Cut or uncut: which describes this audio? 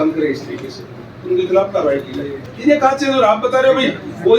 cut